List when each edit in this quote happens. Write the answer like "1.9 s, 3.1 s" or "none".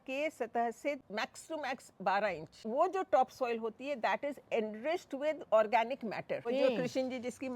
1.0 s, 2.6 s, 6.4 s